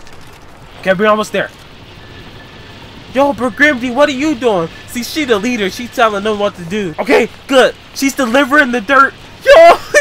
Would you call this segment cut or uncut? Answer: uncut